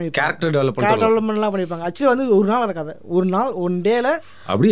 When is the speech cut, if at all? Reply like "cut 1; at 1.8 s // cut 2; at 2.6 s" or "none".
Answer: none